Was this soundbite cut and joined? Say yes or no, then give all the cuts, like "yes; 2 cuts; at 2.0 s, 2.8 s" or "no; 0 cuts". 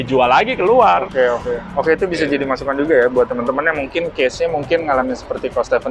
no; 0 cuts